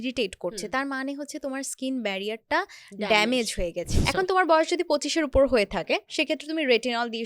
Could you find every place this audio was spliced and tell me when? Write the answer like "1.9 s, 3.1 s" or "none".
3.9 s